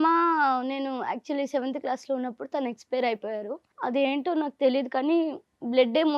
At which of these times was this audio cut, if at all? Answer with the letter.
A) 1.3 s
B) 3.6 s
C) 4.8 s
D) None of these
B